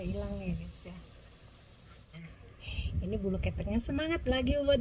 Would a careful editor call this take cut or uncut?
cut